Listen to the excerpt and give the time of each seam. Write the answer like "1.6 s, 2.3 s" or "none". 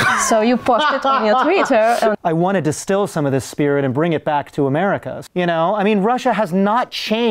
2.1 s, 5.2 s